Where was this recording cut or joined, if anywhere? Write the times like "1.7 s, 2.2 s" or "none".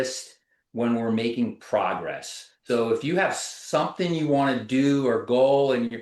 2.4 s